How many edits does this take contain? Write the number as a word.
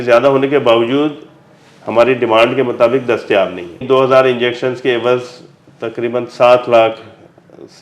one